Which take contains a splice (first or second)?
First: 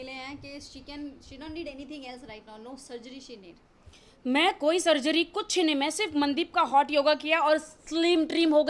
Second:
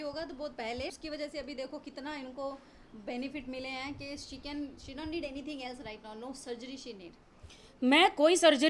second